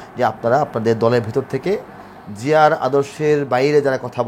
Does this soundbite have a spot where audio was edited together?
no; 0 cuts

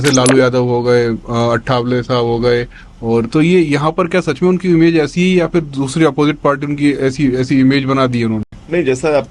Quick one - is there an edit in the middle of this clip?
no; 0 cuts

